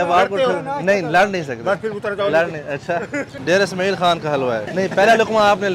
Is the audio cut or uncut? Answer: cut